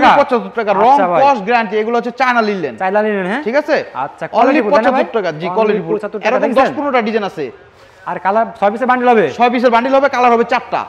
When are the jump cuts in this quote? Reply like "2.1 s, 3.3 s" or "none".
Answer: none